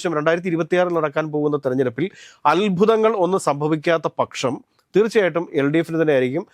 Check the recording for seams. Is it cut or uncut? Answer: uncut